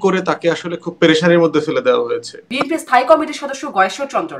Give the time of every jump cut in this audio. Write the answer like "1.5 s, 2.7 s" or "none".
2.6 s